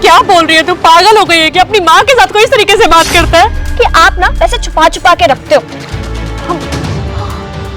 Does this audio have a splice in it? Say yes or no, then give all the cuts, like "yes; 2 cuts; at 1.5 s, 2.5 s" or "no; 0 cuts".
yes; 1 cut; at 3.6 s